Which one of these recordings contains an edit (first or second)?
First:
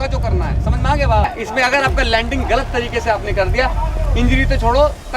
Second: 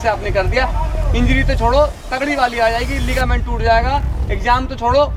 first